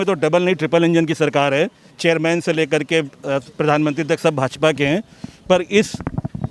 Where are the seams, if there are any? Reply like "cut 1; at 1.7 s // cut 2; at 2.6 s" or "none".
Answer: none